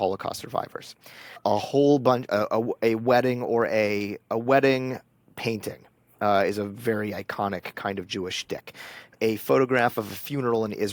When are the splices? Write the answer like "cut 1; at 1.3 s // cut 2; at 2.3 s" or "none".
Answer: none